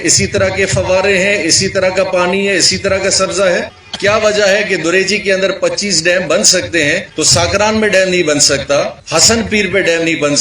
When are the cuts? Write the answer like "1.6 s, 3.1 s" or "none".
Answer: 3.8 s, 7.1 s, 9.0 s